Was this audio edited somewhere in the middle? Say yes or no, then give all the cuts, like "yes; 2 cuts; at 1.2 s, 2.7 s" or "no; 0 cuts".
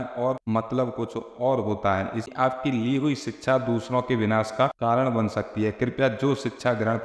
yes; 1 cut; at 2.3 s